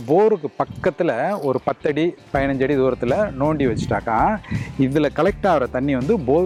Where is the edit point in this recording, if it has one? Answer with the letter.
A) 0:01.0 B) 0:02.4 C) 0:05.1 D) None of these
D